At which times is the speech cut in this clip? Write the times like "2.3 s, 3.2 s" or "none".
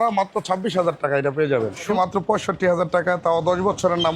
1.9 s